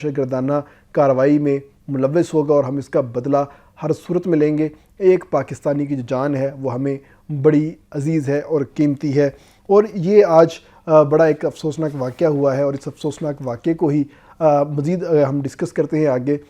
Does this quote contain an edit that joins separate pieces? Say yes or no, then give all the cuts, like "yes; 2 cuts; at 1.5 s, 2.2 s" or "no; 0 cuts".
no; 0 cuts